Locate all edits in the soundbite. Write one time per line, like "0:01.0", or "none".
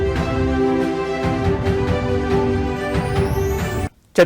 0:03.3